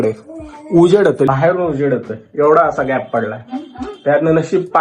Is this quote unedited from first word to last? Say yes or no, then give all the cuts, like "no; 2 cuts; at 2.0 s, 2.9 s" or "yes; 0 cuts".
no; 1 cut; at 1.3 s